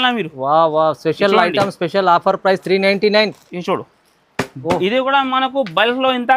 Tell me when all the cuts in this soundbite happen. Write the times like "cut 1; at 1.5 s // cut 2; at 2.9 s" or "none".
none